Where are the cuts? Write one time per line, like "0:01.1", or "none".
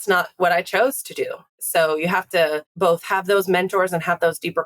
0:01.6
0:02.7